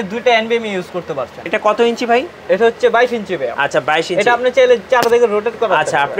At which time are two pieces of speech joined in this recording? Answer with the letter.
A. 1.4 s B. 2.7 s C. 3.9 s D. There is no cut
A